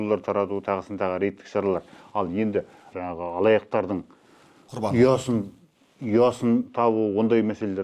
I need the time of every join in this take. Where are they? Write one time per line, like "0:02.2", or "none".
0:02.8